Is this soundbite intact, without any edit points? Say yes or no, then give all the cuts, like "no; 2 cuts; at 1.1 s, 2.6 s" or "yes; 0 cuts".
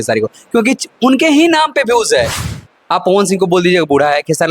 no; 1 cut; at 2.6 s